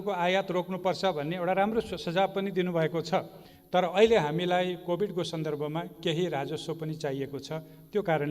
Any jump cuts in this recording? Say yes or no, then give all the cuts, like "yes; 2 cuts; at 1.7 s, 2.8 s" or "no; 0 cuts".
yes; 1 cut; at 3.4 s